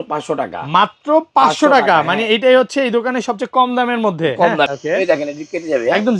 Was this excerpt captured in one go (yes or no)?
no